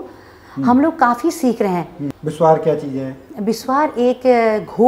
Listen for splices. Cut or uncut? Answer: cut